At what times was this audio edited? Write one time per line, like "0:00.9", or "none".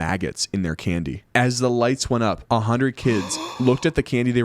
0:02.4